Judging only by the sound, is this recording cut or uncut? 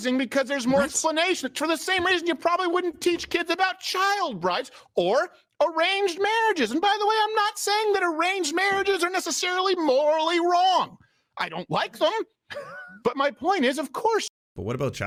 uncut